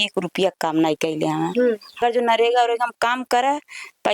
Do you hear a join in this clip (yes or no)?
yes